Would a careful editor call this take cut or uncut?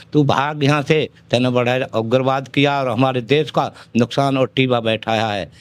uncut